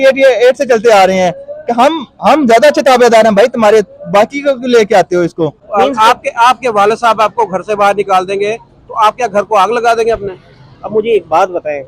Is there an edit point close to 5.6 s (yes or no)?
yes